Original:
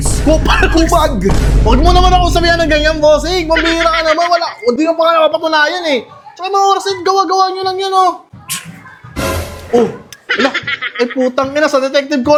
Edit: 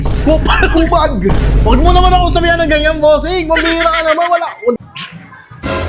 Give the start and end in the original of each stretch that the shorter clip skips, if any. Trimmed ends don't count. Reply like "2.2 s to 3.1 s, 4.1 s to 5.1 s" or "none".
4.8 s to 8.3 s